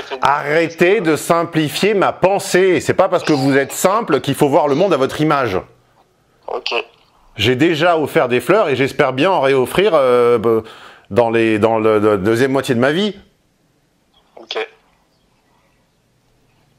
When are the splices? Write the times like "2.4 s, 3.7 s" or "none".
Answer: none